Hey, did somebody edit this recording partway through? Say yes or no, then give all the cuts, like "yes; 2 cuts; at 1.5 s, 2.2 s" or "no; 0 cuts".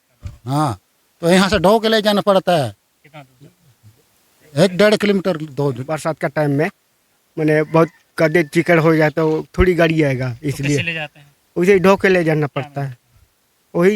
yes; 1 cut; at 5.9 s